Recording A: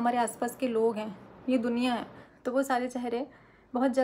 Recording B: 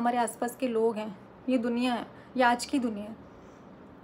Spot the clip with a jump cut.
A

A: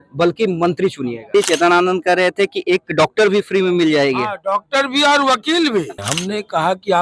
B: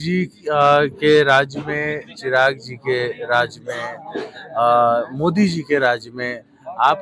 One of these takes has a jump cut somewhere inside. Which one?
A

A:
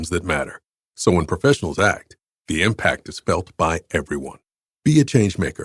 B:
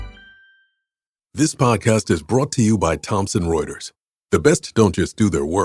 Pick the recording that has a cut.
B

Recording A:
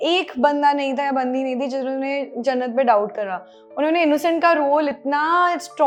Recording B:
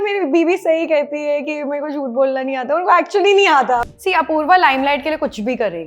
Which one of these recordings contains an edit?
B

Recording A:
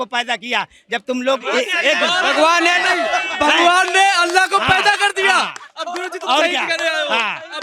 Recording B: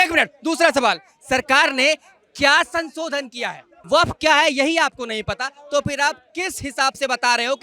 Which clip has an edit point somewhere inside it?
B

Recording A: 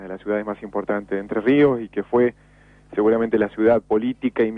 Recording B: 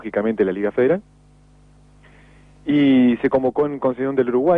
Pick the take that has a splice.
A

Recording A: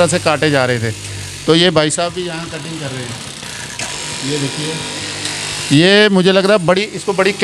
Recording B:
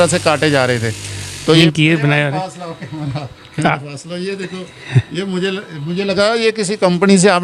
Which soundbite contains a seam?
B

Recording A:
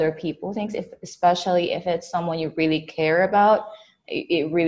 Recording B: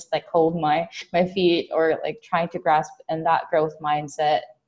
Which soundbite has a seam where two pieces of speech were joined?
B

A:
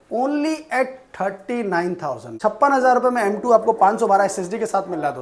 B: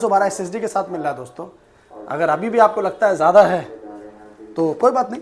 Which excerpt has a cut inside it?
A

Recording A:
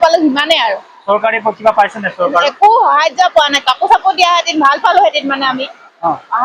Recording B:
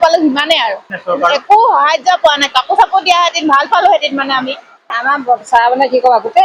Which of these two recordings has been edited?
B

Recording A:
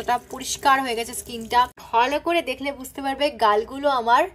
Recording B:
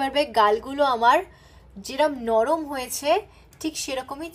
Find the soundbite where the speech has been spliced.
A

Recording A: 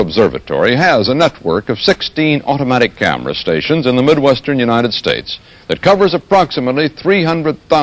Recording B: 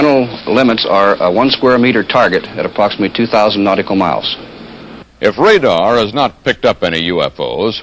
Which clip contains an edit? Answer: A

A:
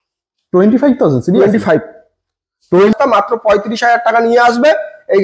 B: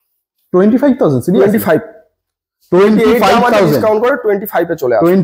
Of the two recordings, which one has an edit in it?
A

